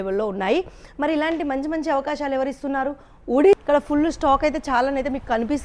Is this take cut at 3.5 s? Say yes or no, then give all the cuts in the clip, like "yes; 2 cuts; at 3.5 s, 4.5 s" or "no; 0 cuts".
yes; 1 cut; at 3.5 s